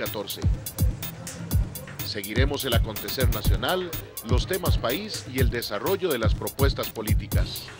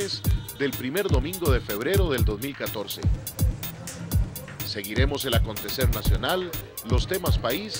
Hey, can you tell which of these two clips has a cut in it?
first; 1 cut; at 6.5 s

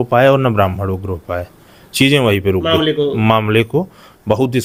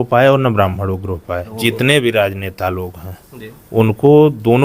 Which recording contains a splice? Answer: second; 1 cut; at 1.5 s

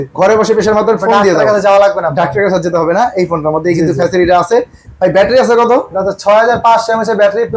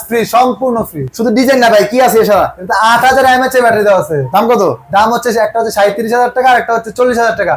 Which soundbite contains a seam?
second; 1 cut; at 1.1 s

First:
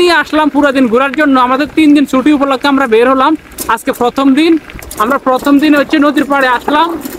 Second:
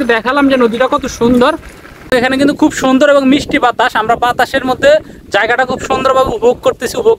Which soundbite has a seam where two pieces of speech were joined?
second; 1 cut; at 1.9 s

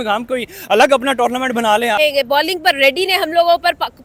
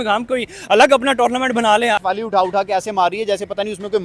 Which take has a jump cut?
second; 1 cut; at 2.0 s

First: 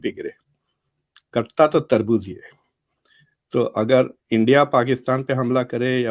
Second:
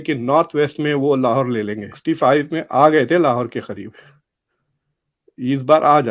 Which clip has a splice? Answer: second; 1 cut; at 1.9 s

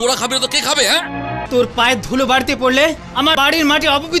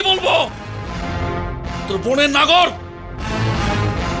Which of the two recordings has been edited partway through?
first; 1 cut; at 1.4 s

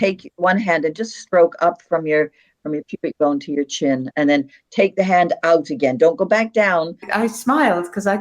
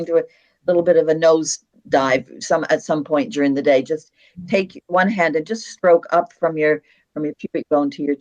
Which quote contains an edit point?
first; 1 cut; at 7.0 s

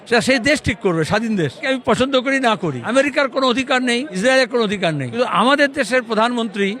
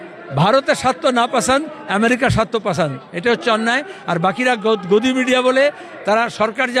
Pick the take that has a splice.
first; 4 cuts; at 1.6 s, 2.8 s, 4.1 s, 5.1 s

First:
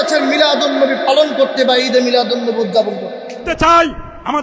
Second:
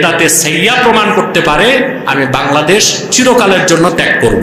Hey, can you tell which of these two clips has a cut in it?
first; 1 cut; at 3.5 s

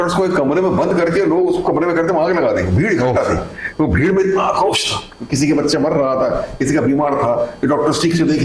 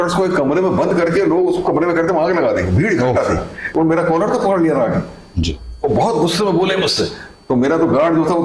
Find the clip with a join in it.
second; 1 cut; at 3.6 s

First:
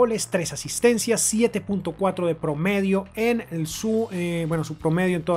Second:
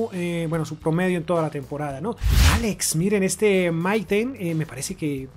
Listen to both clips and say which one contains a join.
second; 1 cut; at 2.3 s

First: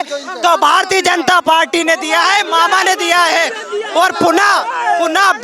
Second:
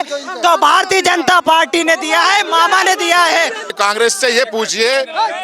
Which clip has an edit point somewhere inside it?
second; 1 cut; at 3.7 s

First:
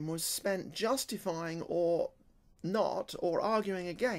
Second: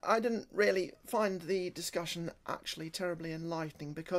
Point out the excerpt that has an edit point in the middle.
second; 1 cut; at 2.1 s

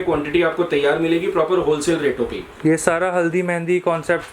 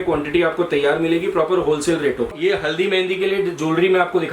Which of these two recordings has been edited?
second; 1 cut; at 2.4 s

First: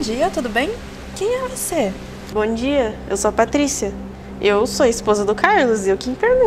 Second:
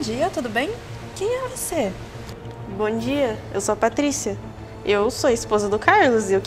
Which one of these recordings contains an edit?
first; 1 cut; at 2.1 s

